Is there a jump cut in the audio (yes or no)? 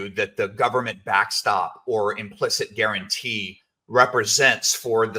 no